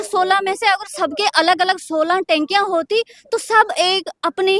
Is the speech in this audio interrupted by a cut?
no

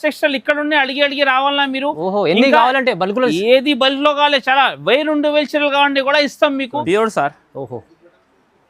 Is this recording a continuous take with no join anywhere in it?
no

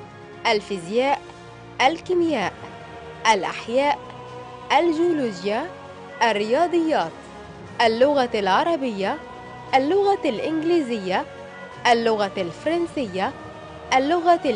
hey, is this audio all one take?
yes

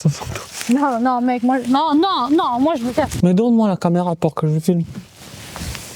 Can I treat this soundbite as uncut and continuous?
no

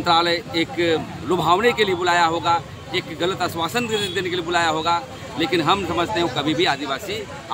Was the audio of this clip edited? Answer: no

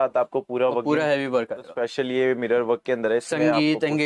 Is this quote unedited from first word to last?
no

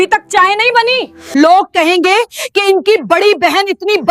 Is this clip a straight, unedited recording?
no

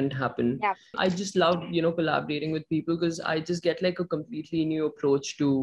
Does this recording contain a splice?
yes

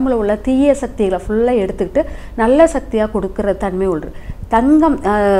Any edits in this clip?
no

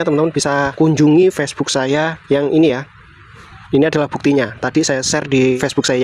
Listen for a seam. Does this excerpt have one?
no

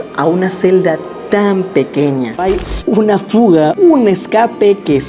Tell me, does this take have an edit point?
yes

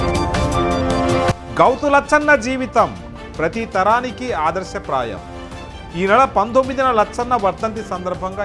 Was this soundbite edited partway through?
yes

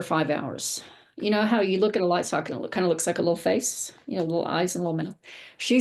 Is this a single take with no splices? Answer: yes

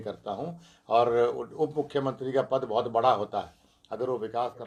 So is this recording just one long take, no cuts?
yes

